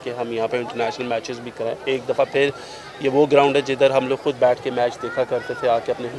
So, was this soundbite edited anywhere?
no; 0 cuts

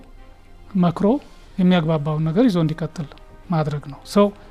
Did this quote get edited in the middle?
no; 0 cuts

